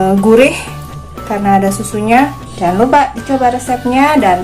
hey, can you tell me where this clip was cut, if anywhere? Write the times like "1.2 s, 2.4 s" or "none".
2.4 s